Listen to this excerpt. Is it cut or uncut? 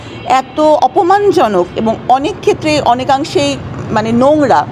uncut